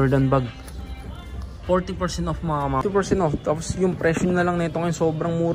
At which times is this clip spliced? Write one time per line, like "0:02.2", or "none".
0:02.8